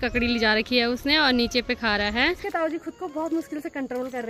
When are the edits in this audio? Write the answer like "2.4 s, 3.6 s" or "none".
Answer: 2.4 s